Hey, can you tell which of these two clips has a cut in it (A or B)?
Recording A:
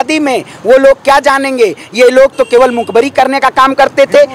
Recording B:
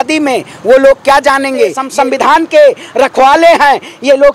B